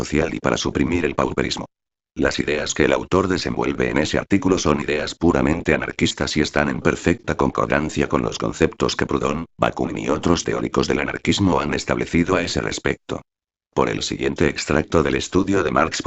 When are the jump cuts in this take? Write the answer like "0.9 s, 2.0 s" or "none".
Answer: none